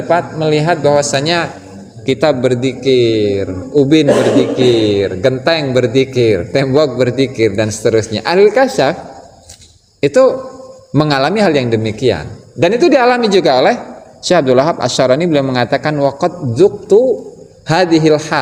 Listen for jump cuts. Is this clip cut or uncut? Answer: uncut